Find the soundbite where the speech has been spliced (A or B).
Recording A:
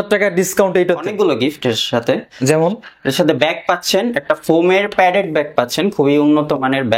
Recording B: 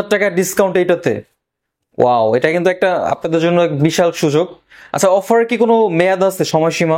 A